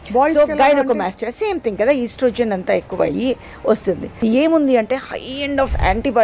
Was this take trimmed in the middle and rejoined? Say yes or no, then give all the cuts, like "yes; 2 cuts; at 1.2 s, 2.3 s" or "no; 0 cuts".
yes; 1 cut; at 4.2 s